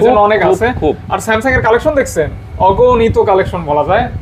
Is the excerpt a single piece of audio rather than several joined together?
yes; 0 cuts

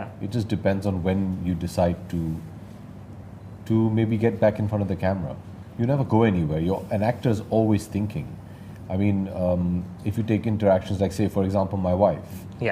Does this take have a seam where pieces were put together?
no; 0 cuts

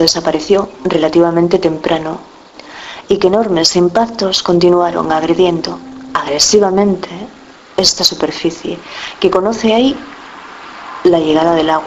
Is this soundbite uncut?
yes; 0 cuts

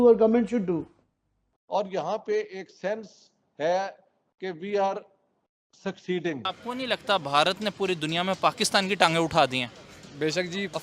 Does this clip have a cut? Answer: yes; 2 cuts; at 1.0 s, 6.5 s

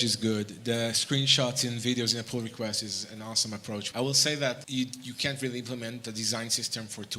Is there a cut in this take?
yes; 2 cuts; at 3.9 s, 4.6 s

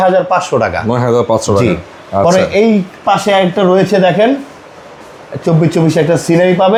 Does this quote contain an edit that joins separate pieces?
no; 0 cuts

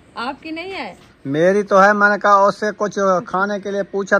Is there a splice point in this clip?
yes; 1 cut; at 1.1 s

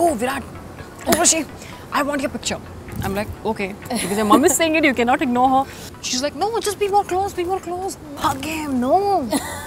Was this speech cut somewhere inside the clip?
yes; 2 cuts; at 5.8 s, 8.2 s

